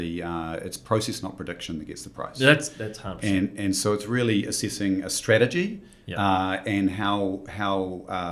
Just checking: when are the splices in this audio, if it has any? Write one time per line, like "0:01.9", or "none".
none